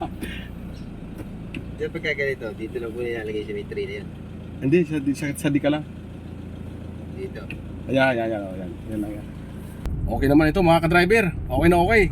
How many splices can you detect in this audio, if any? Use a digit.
1